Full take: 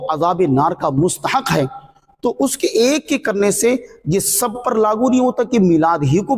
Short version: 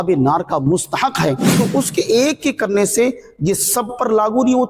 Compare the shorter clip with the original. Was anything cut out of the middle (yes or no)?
yes